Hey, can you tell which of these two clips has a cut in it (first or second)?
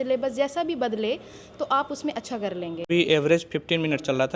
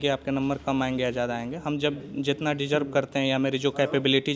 first